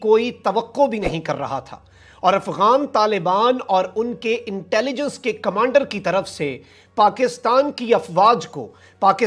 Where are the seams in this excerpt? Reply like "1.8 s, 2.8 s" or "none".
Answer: none